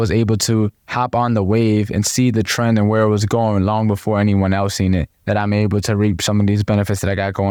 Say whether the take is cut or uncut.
uncut